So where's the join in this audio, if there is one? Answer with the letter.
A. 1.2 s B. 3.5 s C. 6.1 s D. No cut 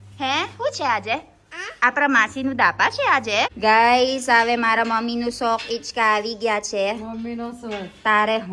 B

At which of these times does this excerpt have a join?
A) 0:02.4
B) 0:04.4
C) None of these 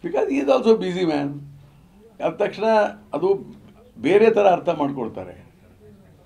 C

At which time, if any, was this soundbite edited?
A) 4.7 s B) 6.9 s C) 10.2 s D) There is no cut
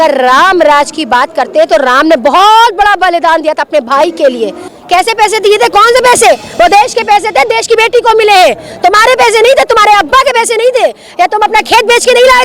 A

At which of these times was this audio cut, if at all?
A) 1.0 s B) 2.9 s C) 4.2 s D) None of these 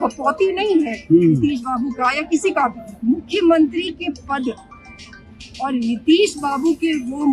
B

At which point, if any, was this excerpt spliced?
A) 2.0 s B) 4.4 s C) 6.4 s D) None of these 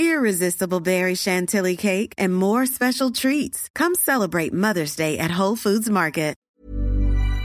C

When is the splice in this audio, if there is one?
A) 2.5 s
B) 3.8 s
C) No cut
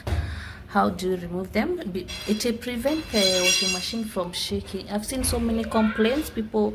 C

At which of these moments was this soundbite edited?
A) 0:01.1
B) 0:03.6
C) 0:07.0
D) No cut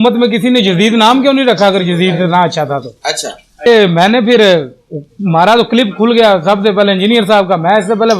B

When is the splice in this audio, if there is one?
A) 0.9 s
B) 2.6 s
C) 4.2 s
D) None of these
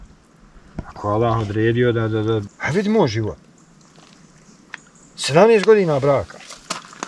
B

